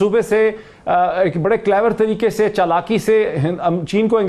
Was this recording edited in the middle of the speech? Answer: no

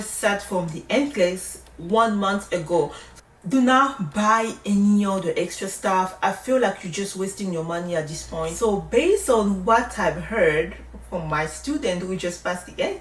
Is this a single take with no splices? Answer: no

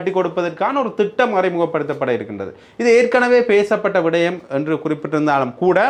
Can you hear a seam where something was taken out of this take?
no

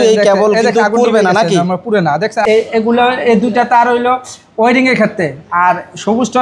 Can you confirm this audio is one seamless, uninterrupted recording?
no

